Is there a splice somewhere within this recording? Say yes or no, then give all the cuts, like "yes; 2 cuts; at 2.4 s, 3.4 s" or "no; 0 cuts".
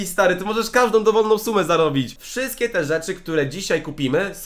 yes; 1 cut; at 2.1 s